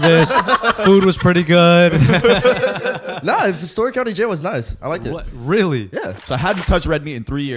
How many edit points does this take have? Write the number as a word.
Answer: one